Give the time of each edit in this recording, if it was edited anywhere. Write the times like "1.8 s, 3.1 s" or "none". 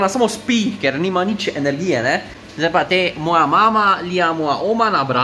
2.4 s